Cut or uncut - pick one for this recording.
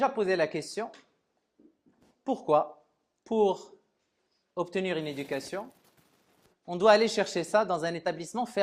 uncut